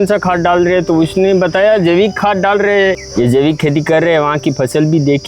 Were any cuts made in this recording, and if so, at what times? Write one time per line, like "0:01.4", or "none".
0:03.0